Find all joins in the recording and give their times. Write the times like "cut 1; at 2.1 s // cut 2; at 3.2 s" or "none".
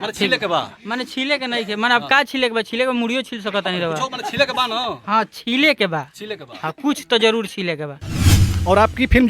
cut 1; at 8.3 s